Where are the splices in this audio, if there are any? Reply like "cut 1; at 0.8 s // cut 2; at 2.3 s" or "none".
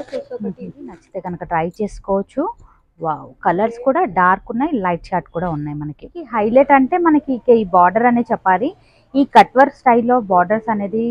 cut 1; at 1.1 s // cut 2; at 6.3 s